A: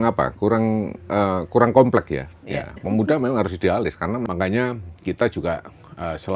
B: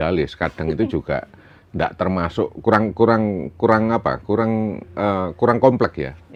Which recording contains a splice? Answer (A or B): A